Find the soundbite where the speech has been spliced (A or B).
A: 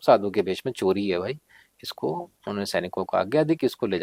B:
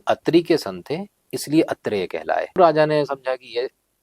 B